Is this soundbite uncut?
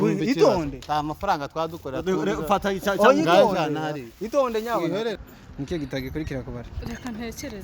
no; 1 cut; at 5.2 s

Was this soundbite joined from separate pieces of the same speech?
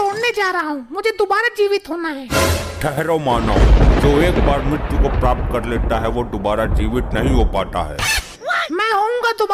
no; 0 cuts

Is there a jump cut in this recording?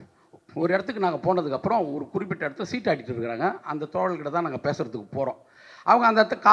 no; 0 cuts

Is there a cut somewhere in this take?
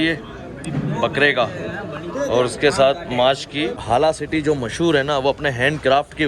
yes; 1 cut; at 3.8 s

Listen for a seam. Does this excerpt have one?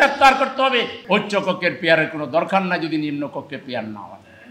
yes; 1 cut; at 1.0 s

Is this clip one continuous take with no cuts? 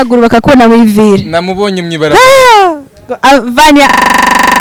yes; 0 cuts

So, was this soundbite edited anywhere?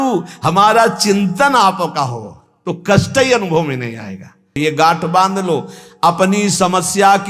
yes; 1 cut; at 4.6 s

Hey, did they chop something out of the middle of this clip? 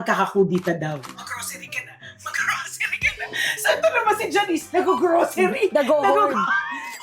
yes; 1 cut; at 1.2 s

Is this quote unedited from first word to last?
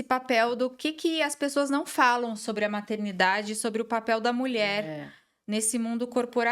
yes; 0 cuts

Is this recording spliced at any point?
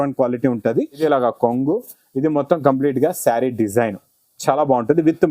yes; 1 cut; at 1.0 s

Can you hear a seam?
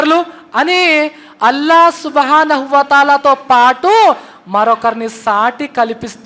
no; 0 cuts

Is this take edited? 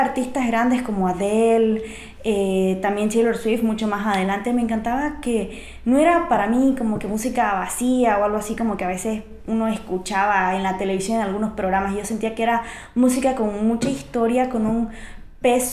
no; 0 cuts

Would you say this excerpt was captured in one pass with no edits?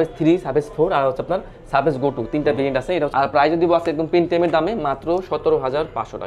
no; 1 cut; at 3.1 s

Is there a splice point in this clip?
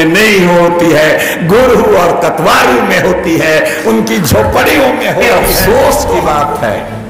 yes; 1 cut; at 5.2 s

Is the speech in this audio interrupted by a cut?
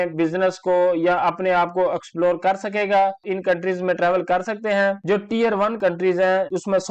yes; 2 cuts; at 3.2 s, 5.0 s

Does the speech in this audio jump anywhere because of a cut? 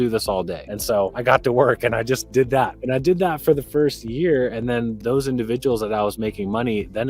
yes; 3 cuts; at 1.0 s, 2.8 s, 4.9 s

